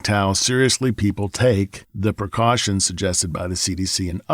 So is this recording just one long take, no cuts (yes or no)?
no